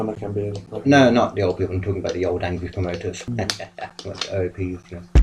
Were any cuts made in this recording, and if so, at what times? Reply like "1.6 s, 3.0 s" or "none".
3.3 s